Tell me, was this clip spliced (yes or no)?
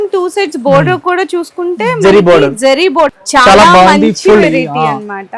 yes